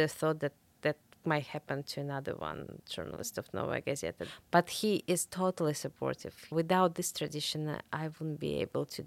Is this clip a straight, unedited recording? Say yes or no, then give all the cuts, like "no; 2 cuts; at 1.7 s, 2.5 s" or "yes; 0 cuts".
no; 2 cuts; at 4.2 s, 6.5 s